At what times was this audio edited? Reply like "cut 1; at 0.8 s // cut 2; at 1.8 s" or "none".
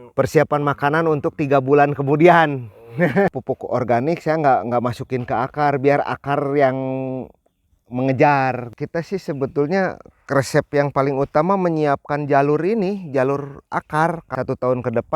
cut 1; at 3.3 s // cut 2; at 8.7 s // cut 3; at 14.2 s